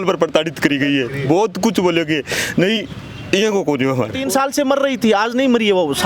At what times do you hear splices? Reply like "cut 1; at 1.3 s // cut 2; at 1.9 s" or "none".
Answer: cut 1; at 4.2 s